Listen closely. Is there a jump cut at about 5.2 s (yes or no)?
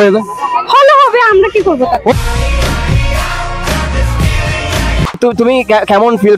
yes